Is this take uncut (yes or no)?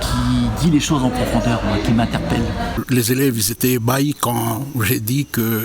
no